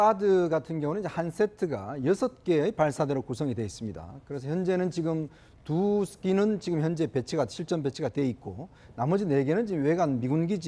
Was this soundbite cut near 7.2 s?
yes; 1 cut; at 7.2 s

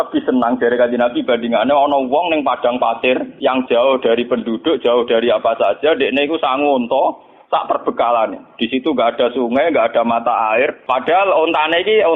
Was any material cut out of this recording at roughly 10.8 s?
yes; 2 cuts; at 3.3 s, 10.8 s

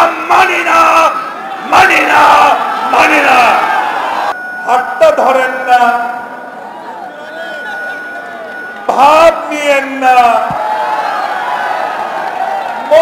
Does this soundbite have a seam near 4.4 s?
yes; 1 cut; at 4.4 s

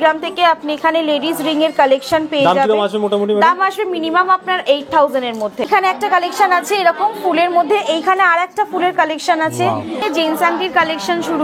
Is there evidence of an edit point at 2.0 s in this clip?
no; 2 cuts; at 5.7 s, 10.0 s

